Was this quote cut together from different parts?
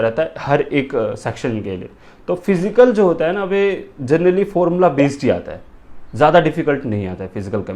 no; 0 cuts

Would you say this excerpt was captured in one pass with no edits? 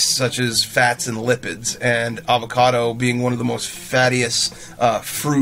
yes; 0 cuts

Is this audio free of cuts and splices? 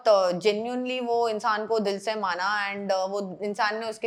yes; 0 cuts

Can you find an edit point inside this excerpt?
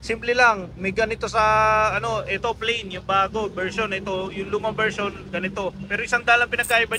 no; 0 cuts

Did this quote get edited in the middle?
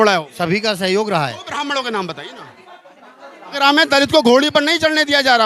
yes; 1 cut; at 3.5 s

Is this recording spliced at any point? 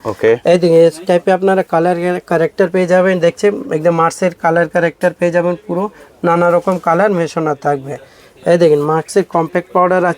no; 0 cuts

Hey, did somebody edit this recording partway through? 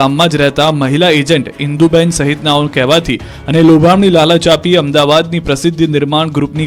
no; 0 cuts

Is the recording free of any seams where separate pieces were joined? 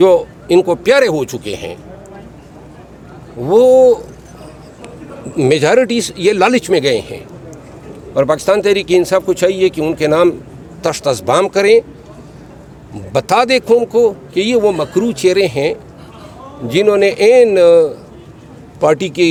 yes; 0 cuts

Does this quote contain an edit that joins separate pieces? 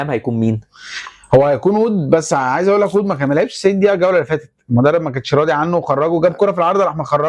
no; 0 cuts

